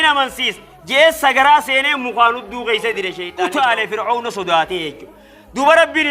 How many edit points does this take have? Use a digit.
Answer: 1